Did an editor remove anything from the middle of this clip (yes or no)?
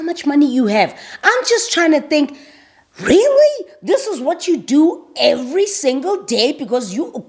no